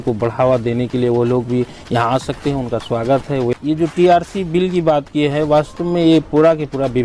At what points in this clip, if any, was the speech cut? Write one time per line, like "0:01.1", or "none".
0:03.5